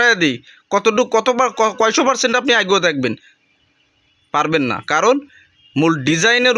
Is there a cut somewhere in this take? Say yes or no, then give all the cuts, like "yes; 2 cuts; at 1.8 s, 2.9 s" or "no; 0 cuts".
no; 0 cuts